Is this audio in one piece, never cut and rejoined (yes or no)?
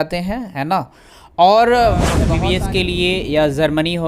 no